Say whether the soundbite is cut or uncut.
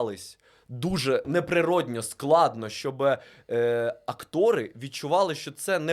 cut